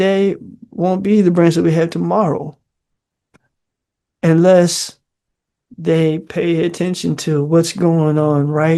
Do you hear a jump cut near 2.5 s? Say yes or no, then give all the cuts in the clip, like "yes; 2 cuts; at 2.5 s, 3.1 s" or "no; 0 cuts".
no; 0 cuts